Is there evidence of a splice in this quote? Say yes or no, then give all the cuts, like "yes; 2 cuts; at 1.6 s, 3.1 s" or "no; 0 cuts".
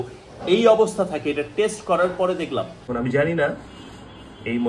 yes; 1 cut; at 2.8 s